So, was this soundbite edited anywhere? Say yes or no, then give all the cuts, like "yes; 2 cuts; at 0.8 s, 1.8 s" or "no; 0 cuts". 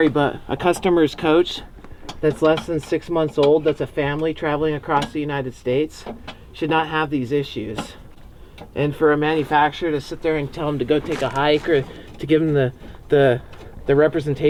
no; 0 cuts